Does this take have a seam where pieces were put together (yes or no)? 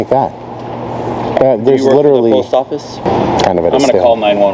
yes